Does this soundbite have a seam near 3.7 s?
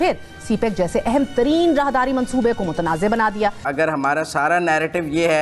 yes; 1 cut; at 3.7 s

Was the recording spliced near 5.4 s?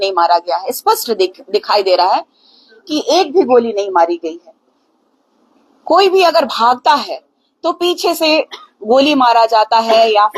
no; 0 cuts

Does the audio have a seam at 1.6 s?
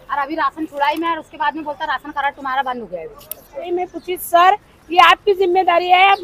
no; 1 cut; at 3.6 s

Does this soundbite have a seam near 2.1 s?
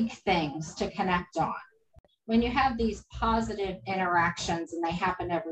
yes; 1 cut; at 2.1 s

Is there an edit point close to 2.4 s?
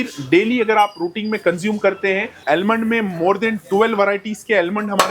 yes; 1 cut; at 2.4 s

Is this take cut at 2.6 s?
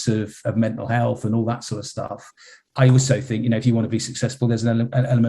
yes; 1 cut; at 2.6 s

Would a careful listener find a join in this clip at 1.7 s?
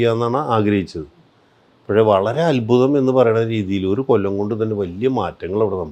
no; 0 cuts

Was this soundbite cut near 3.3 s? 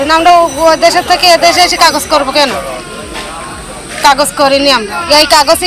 no; 0 cuts

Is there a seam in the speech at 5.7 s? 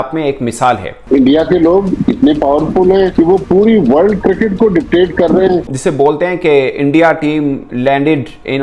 yes; 2 cuts; at 1.0 s, 5.7 s

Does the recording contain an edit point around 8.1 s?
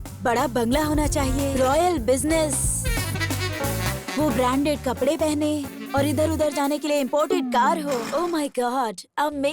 yes; 3 cuts; at 1.5 s, 5.8 s, 8.1 s

